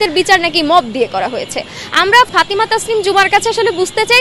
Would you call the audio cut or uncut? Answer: cut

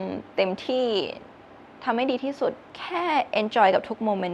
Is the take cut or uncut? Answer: uncut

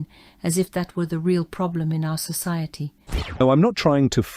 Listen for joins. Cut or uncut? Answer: cut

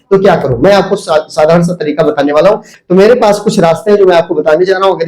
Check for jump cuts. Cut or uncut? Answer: cut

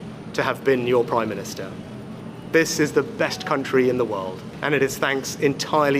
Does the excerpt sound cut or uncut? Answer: cut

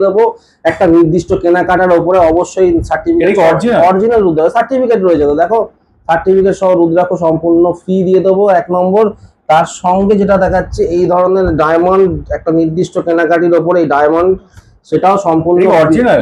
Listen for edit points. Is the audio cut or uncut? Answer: uncut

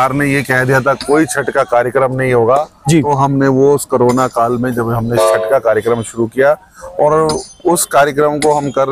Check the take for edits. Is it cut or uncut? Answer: uncut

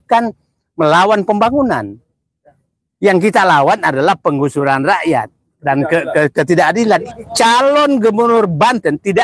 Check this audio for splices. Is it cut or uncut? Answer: cut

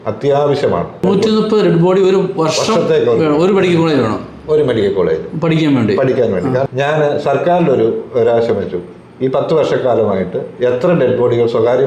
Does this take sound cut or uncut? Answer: cut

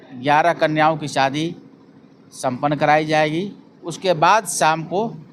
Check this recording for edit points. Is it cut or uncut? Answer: uncut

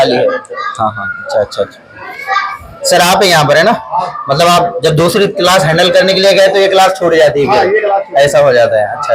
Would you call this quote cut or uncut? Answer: uncut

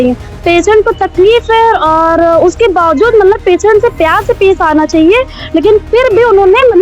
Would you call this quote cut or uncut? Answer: uncut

